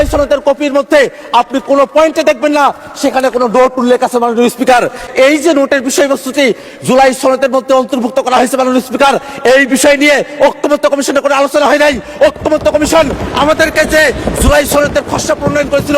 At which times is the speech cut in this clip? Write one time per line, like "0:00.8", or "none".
0:05.0